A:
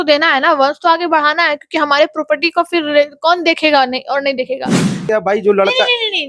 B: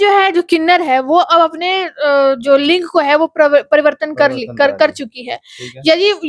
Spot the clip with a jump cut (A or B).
A